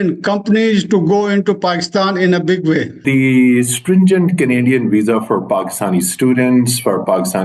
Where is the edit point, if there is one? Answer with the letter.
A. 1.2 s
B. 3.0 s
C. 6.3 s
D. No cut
B